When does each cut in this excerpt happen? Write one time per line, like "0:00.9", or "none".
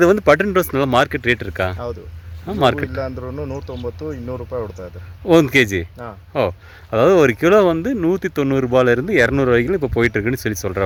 none